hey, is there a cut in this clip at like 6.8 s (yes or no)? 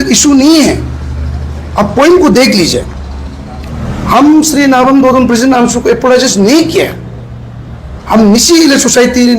no